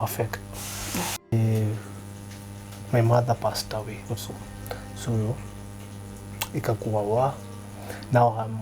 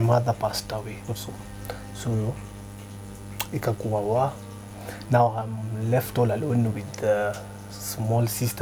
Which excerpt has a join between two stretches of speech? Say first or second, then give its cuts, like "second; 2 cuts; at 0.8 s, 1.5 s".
first; 1 cut; at 1.3 s